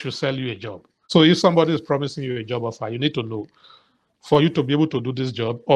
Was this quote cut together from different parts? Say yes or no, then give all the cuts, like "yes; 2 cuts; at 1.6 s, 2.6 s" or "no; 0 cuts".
yes; 1 cut; at 1.0 s